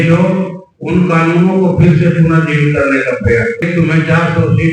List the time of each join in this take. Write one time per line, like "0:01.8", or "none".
0:03.6

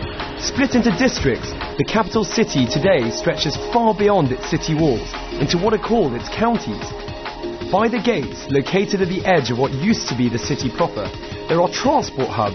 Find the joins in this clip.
0:08.4

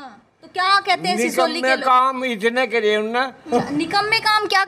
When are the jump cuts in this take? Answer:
0:03.4

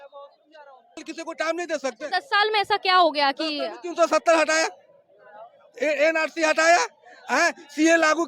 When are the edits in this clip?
0:01.1

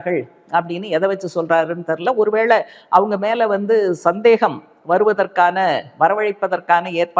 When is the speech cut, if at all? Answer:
none

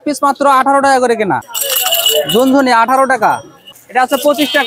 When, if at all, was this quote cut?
0:01.6
0:03.7

